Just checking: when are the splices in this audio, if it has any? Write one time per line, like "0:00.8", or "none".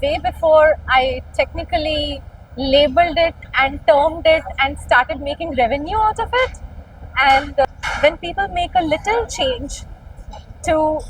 0:07.6